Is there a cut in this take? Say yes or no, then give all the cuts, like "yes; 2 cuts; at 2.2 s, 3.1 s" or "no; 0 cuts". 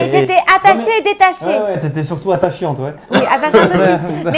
no; 0 cuts